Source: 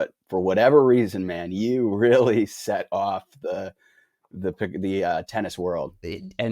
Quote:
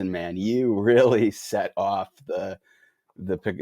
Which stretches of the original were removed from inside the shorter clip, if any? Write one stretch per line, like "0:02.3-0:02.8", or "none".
none